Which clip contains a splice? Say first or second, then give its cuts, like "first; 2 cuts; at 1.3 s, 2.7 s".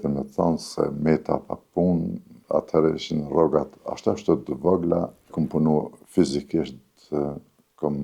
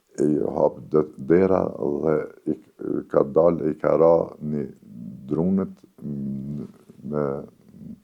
first; 1 cut; at 5.3 s